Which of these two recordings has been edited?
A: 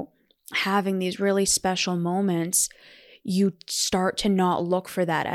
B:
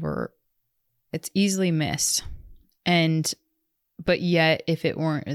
B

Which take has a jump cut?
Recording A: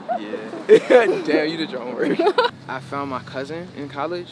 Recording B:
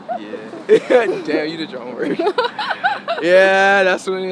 A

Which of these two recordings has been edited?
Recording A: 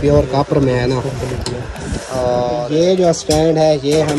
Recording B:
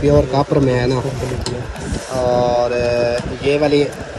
A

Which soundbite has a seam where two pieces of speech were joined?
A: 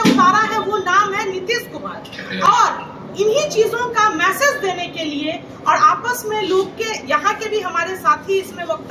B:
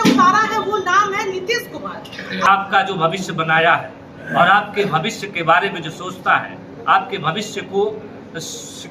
B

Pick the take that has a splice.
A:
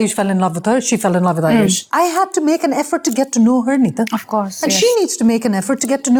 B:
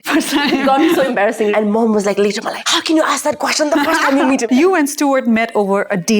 B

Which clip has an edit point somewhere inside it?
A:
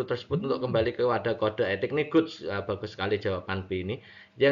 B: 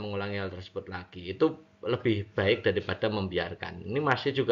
B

